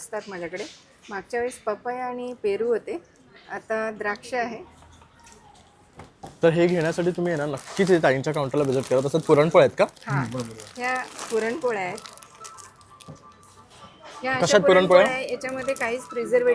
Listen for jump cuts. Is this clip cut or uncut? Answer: uncut